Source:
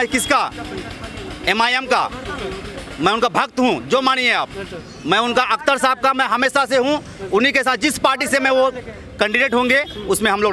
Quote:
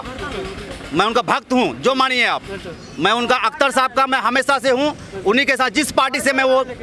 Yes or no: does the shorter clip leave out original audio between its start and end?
no